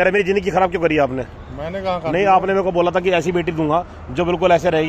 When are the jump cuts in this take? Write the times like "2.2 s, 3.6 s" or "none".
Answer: none